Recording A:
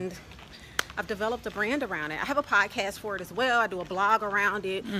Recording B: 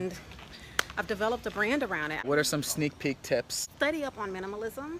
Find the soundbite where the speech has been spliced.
B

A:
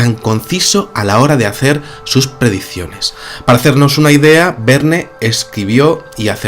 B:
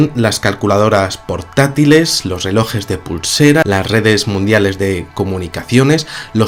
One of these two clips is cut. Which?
A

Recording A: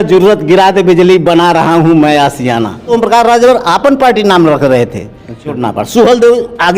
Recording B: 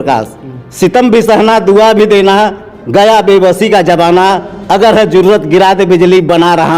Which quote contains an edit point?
A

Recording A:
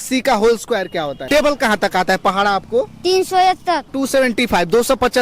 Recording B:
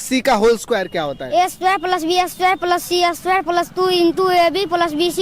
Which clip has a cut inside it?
A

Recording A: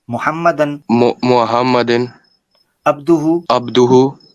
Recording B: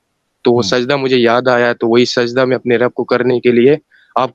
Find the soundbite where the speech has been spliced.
A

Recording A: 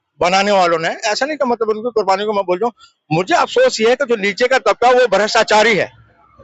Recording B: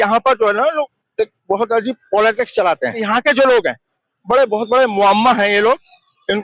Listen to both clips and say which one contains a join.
B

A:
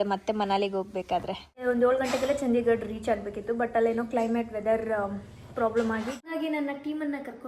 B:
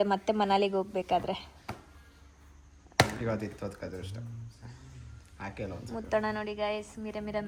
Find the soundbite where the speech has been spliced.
A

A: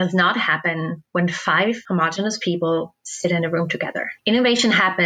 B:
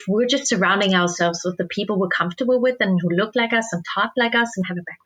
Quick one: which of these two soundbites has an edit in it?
A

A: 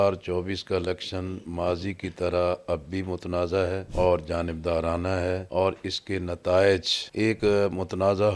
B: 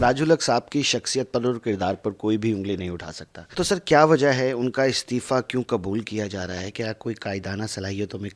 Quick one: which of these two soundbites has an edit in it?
A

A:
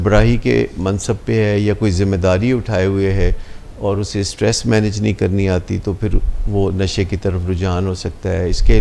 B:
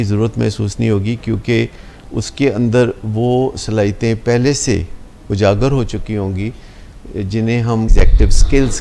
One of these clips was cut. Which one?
B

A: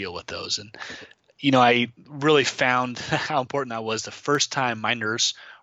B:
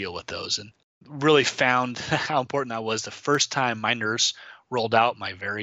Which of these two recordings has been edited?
B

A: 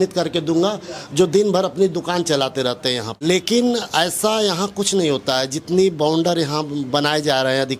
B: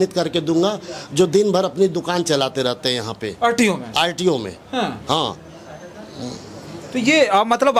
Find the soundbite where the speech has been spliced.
A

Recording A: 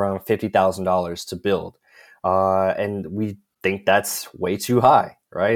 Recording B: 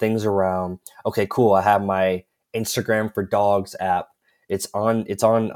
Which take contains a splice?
A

